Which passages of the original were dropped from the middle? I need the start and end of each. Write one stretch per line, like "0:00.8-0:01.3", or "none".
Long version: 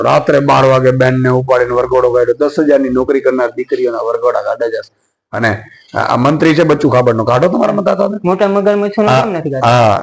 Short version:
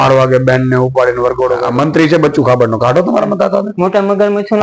0:02.2-0:06.1